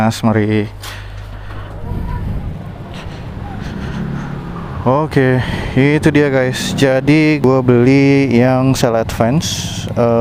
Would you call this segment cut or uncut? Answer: uncut